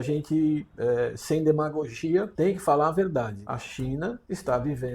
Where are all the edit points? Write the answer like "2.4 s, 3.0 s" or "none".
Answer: 2.3 s, 3.8 s